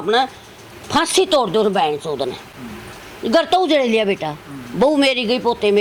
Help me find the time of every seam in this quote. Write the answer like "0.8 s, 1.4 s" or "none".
none